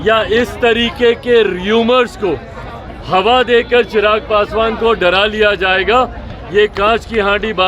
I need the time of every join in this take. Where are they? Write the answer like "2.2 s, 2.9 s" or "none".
none